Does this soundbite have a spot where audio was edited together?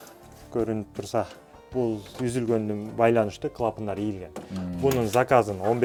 no; 0 cuts

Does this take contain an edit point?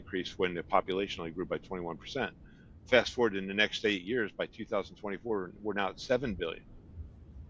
no; 0 cuts

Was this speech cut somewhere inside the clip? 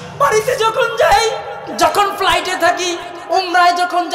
yes; 2 cuts; at 1.6 s, 3.1 s

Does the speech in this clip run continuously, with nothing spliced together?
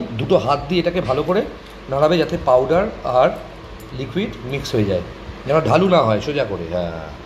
yes; 0 cuts

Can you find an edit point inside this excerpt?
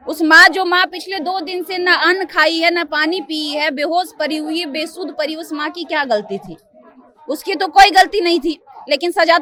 no; 0 cuts

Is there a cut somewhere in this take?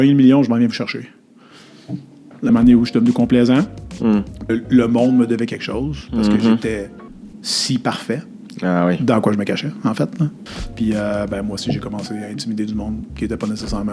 yes; 3 cuts; at 2.5 s, 4.5 s, 10.4 s

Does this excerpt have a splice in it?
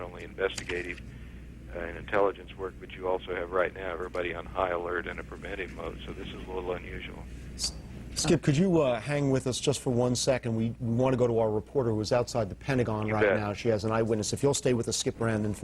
yes; 1 cut; at 2.9 s

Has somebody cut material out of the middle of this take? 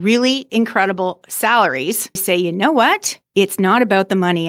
yes; 2 cuts; at 2.2 s, 3.1 s

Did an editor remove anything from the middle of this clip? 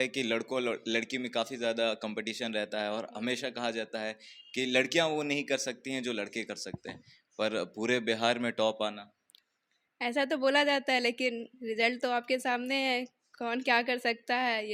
no; 0 cuts

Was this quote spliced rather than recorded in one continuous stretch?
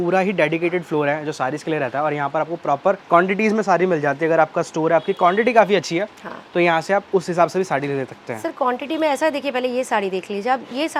no; 0 cuts

